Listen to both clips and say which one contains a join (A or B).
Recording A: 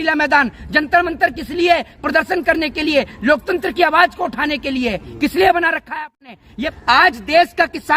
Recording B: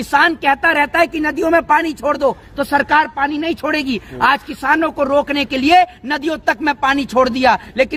A